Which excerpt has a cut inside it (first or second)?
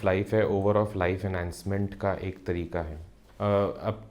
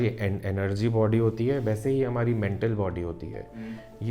first